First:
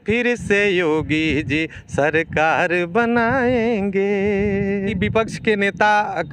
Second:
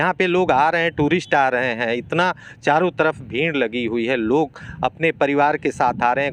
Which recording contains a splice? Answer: first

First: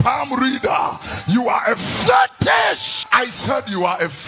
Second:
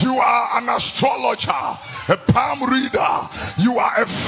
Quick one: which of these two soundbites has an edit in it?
first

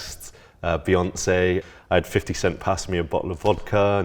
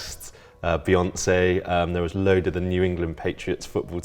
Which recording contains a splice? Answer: first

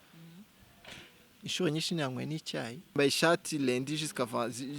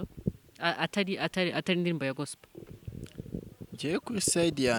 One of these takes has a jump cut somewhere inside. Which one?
first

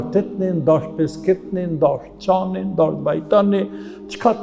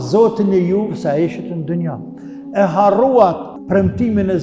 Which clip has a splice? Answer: second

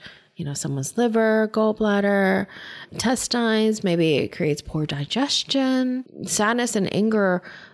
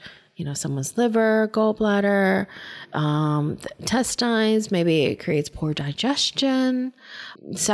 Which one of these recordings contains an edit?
first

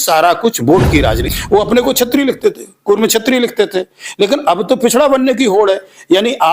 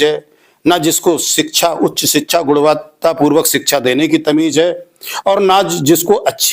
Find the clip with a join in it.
first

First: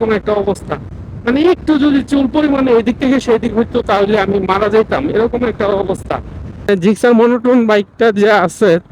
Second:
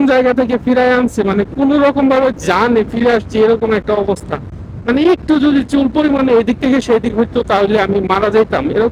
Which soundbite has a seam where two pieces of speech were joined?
first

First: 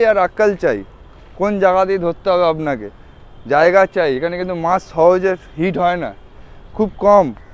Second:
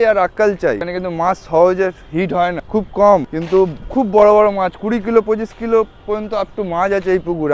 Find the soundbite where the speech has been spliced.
second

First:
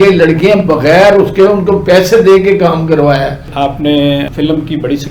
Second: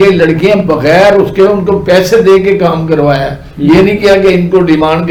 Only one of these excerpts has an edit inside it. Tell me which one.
first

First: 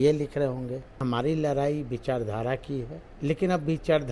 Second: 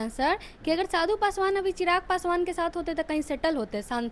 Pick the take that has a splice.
first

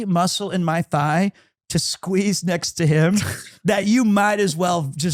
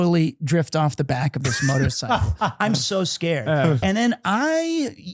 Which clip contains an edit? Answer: second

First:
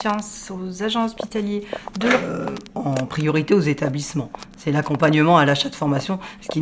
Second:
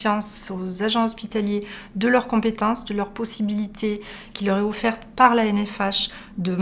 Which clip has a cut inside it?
first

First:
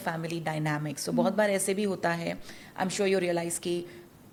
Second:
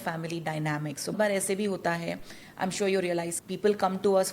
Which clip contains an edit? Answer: second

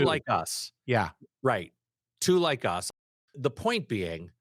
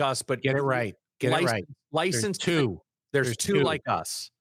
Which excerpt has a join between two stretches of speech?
first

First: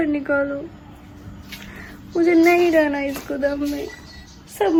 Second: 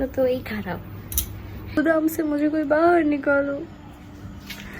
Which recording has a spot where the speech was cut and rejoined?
second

